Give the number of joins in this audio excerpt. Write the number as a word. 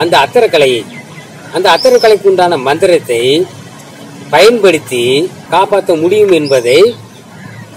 one